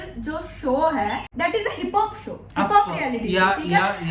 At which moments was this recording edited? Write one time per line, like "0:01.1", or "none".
0:01.3